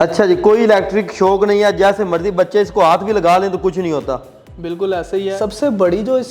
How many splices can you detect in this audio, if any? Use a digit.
1